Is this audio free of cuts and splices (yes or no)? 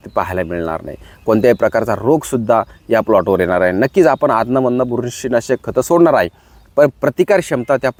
yes